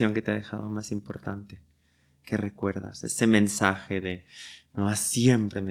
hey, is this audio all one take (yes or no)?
yes